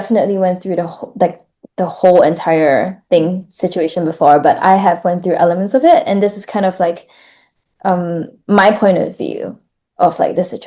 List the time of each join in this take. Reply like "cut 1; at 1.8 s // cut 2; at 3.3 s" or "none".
none